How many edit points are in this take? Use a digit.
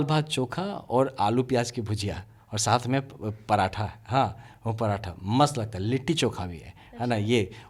0